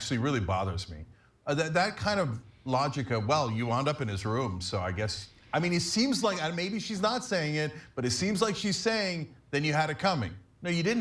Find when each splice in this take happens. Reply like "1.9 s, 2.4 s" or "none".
none